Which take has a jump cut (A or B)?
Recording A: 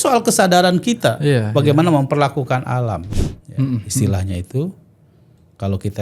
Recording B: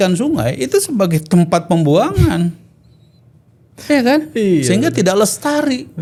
A